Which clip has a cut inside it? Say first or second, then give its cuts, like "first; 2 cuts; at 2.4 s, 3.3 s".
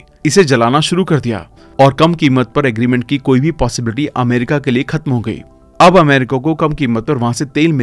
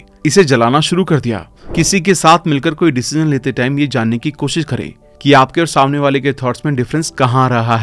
second; 1 cut; at 1.5 s